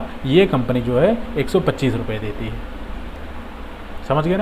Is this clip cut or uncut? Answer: uncut